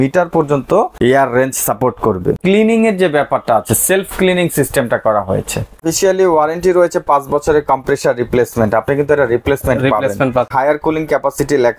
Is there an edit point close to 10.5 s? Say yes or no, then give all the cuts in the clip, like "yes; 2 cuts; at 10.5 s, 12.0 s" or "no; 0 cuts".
yes; 4 cuts; at 0.9 s, 2.4 s, 5.8 s, 10.5 s